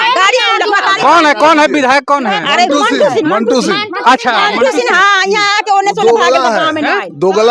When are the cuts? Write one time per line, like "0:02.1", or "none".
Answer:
none